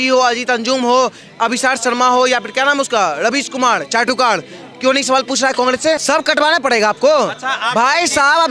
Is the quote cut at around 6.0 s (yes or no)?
yes